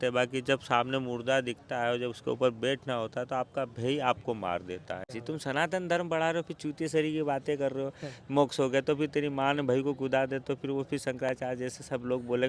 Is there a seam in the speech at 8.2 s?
no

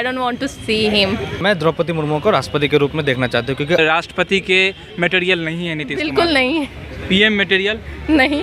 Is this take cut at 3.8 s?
yes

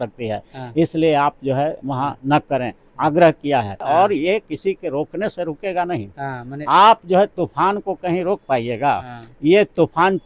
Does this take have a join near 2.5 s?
no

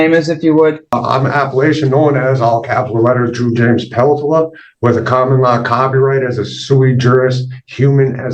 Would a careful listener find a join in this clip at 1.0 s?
yes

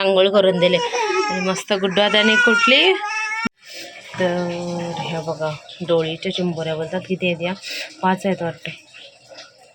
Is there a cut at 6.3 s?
no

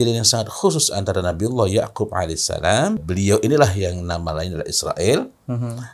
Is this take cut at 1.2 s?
no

